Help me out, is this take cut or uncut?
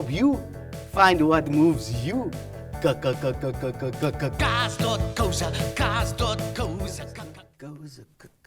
cut